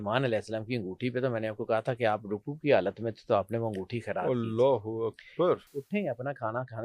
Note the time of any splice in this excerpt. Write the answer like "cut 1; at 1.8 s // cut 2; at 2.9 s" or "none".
cut 1; at 5.7 s